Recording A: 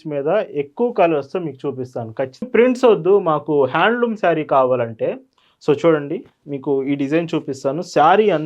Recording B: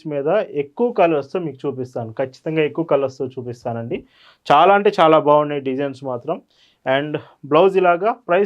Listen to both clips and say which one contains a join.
A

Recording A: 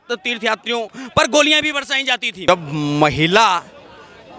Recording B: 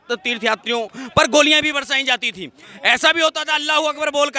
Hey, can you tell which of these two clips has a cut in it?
A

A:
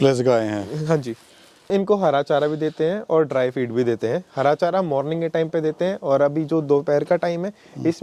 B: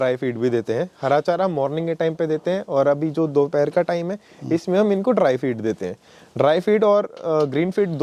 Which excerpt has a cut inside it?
A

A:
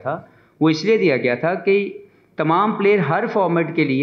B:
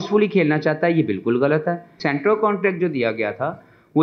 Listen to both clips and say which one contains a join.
B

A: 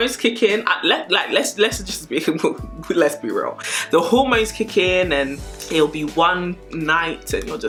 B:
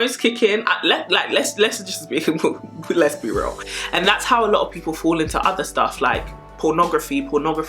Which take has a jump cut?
B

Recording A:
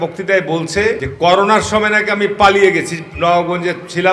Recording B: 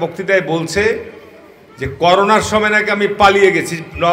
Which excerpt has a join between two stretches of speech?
A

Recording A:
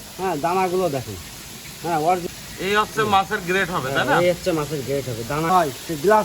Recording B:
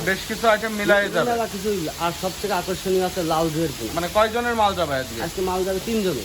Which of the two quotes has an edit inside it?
A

